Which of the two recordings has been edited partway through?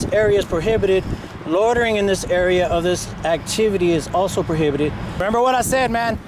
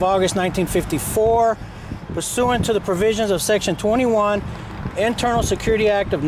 first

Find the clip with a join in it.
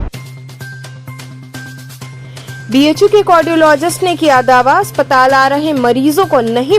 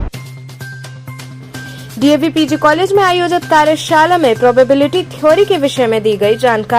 second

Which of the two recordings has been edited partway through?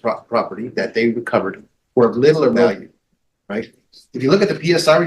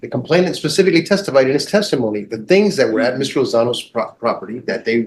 first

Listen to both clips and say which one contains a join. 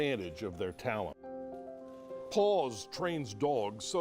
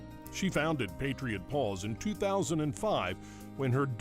first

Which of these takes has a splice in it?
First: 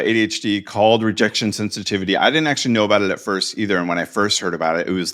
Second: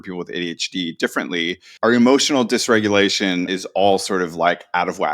second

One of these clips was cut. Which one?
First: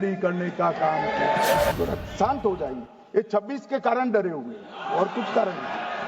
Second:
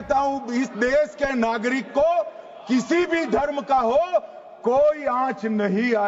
first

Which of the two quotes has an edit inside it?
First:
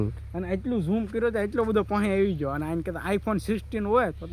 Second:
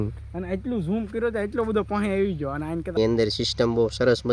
second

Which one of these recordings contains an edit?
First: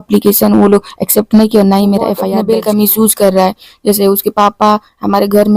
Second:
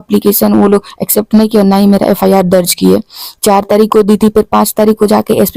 first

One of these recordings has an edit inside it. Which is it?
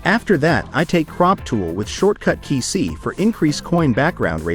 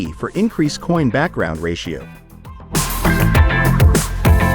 second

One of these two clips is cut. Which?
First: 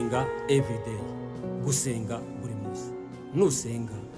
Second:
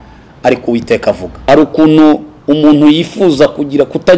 second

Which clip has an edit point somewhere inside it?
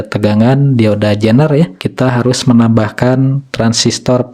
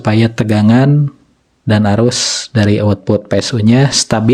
first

